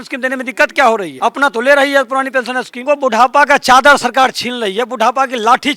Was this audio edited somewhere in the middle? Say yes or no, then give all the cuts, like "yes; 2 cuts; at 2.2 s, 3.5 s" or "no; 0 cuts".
yes; 2 cuts; at 1.1 s, 2.8 s